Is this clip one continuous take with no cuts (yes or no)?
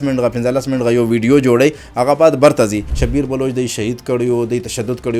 no